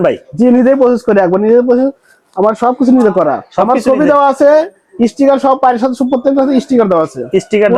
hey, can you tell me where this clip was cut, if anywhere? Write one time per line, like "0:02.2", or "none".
none